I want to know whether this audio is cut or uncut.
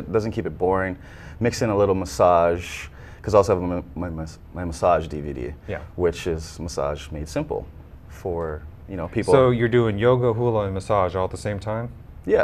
uncut